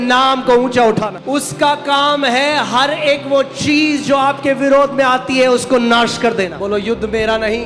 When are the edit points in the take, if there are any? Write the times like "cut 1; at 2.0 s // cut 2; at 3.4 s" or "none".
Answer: cut 1; at 1.1 s // cut 2; at 6.6 s

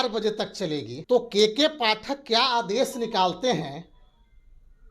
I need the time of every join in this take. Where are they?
cut 1; at 0.9 s

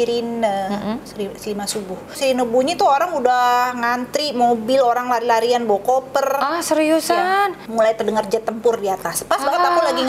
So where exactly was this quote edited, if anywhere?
cut 1; at 2.2 s // cut 2; at 7.6 s

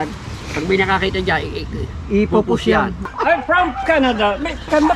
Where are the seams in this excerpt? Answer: cut 1; at 3.1 s

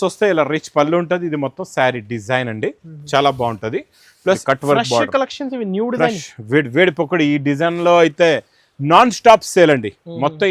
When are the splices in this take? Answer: cut 1; at 4.4 s

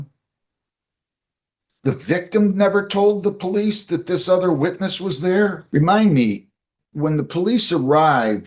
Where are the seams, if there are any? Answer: cut 1; at 5.6 s

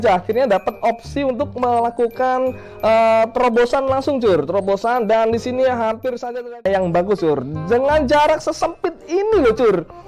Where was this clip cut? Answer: cut 1; at 6.3 s

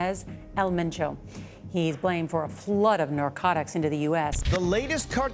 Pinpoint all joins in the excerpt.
cut 1; at 4.4 s

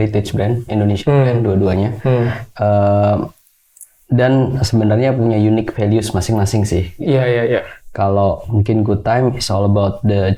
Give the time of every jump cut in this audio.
none

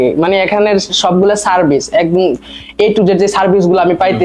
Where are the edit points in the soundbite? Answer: none

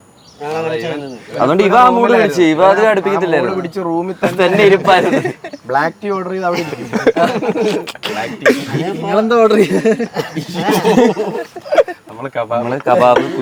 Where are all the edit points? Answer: none

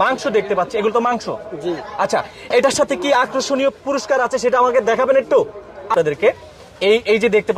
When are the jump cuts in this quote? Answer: cut 1; at 5.9 s

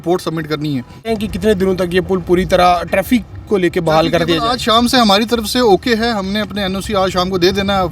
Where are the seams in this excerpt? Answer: cut 1; at 1.1 s

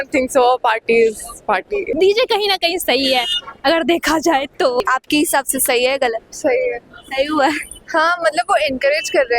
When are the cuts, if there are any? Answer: cut 1; at 1.9 s // cut 2; at 4.8 s

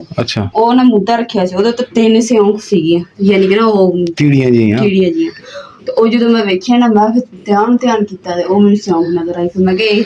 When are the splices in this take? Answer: none

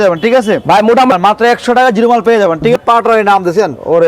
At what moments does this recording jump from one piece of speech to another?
cut 1; at 1.1 s // cut 2; at 2.8 s

